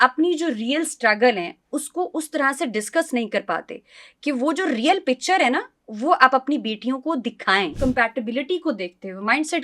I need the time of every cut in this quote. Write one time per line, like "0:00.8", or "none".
0:07.8